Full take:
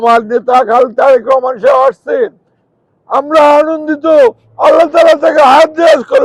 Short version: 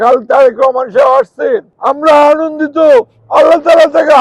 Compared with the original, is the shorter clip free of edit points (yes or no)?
no